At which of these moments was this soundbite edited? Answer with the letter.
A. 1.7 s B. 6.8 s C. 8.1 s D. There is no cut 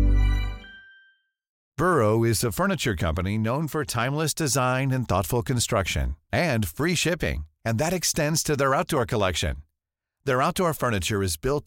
A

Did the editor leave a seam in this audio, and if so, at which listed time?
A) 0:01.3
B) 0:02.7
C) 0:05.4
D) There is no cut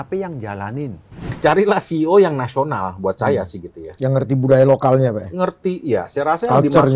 A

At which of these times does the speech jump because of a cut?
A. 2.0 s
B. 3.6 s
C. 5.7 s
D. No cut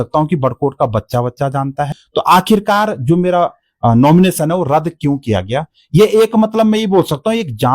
A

